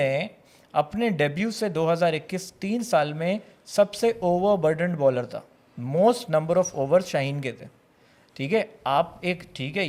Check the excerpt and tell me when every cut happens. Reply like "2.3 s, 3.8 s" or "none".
none